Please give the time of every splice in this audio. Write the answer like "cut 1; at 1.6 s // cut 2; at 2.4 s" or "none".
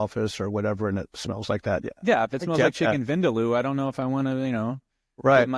none

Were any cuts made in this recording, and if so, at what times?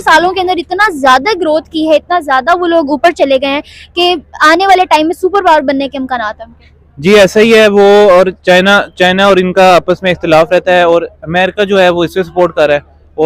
none

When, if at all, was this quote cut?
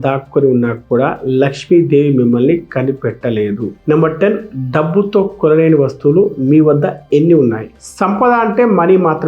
none

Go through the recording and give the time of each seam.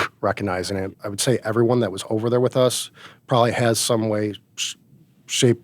cut 1; at 1.1 s

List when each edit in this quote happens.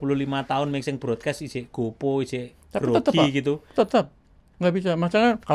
none

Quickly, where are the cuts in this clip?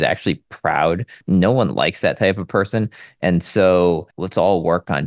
cut 1; at 1.2 s // cut 2; at 4.1 s

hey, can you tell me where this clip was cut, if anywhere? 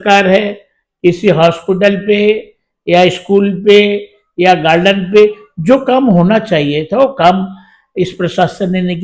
none

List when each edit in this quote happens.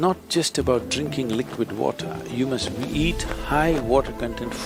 none

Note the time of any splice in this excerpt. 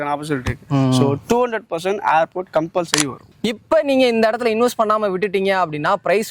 cut 1; at 3.3 s

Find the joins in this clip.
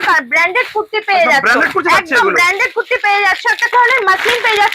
cut 1; at 3.7 s

